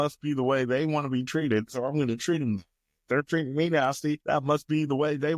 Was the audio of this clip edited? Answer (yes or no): yes